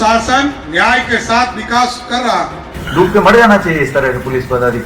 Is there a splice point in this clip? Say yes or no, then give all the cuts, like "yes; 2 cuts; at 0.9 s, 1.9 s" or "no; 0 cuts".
yes; 1 cut; at 2.6 s